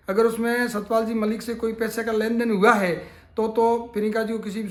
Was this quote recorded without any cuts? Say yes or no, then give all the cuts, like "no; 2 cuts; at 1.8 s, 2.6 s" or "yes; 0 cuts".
yes; 0 cuts